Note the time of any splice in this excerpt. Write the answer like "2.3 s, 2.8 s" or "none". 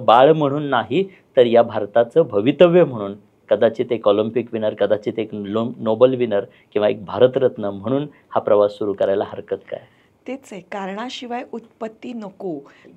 none